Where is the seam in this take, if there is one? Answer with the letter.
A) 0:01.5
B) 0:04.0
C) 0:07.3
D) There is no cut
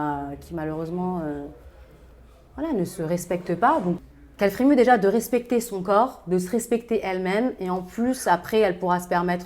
B